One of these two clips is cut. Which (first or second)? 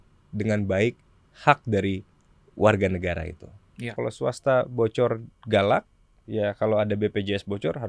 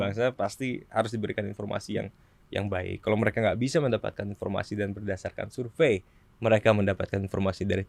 first